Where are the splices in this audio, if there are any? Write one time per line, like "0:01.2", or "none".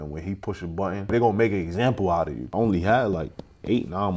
0:01.1
0:02.4